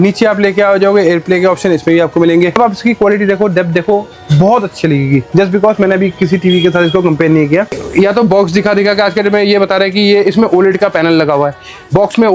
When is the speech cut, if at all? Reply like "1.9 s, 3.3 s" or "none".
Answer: 2.5 s, 7.8 s